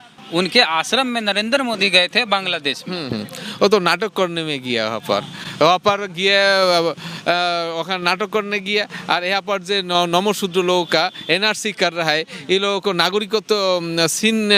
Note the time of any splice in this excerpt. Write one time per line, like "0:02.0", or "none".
none